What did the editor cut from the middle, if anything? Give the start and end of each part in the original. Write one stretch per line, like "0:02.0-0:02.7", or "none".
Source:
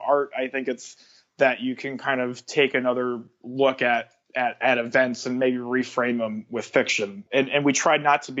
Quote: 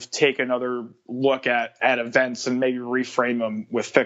0:04.1-0:04.6